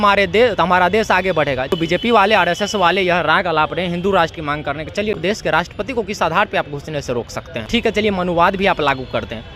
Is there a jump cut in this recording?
yes; 3 cuts; at 1.7 s, 5.2 s, 7.6 s

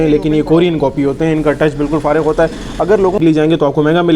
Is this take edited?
yes; 1 cut; at 3.1 s

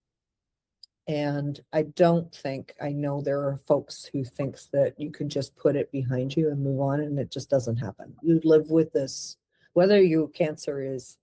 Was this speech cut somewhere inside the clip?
no; 0 cuts

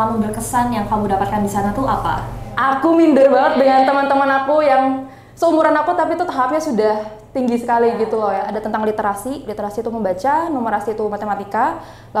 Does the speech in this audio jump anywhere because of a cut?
yes; 2 cuts; at 2.5 s, 8.5 s

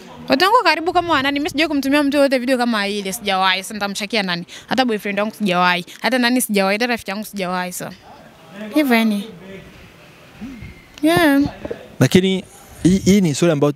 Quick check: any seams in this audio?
no; 0 cuts

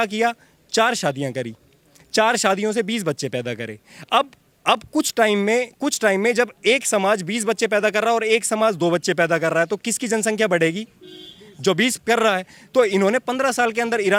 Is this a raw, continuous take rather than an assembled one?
yes; 0 cuts

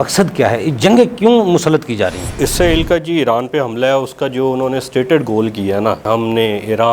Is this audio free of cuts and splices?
no; 2 cuts; at 2.3 s, 6.0 s

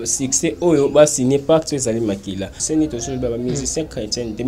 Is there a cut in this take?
yes; 1 cut; at 2.6 s

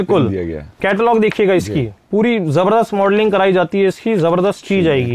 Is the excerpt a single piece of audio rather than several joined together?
yes; 0 cuts

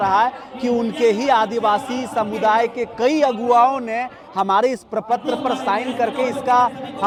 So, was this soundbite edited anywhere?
no; 0 cuts

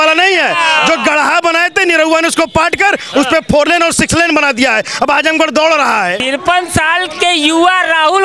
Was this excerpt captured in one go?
no; 1 cut; at 6.2 s

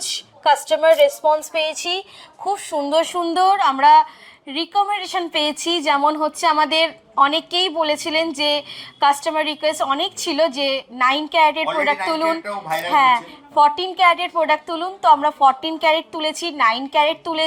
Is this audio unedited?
yes; 0 cuts

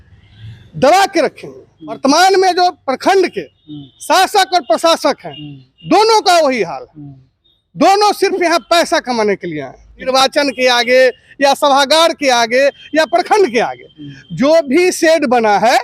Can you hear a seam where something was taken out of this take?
yes; 2 cuts; at 2.0 s, 10.1 s

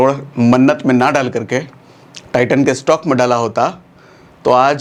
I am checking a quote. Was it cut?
no; 0 cuts

